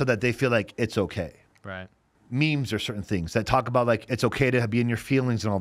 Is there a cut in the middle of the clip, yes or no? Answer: yes